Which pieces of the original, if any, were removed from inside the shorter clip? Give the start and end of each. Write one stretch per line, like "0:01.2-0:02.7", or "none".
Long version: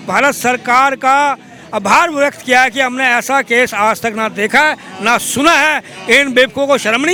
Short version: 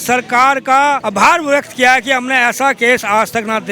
0:01.4-0:01.7

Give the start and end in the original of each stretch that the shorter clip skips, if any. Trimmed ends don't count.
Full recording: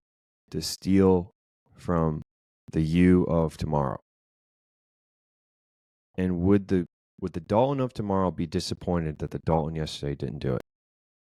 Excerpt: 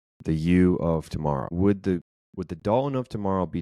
0:04.0-0:06.4

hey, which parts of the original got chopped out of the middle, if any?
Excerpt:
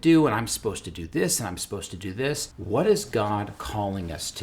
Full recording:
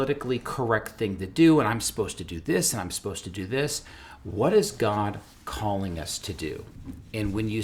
0:03.9-0:04.2
0:05.3-0:05.5

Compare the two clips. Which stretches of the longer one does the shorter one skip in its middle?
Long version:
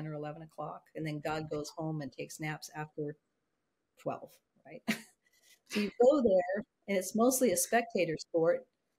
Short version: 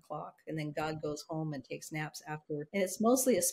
0:03.1-0:06.8

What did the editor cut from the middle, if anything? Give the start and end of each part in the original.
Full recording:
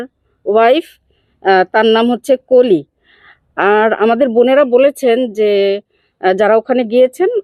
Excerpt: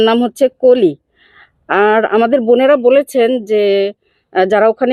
none

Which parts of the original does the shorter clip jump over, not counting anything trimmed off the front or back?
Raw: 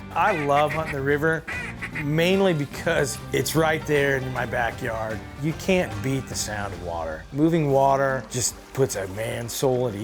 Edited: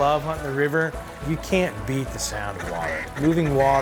0:01.6-0:05.3

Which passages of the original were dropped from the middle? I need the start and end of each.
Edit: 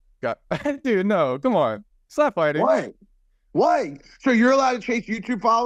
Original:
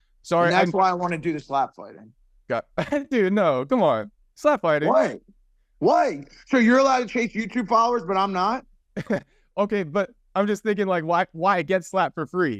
none

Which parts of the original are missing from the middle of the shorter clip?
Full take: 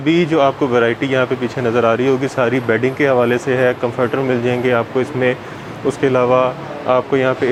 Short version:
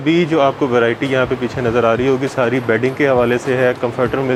none

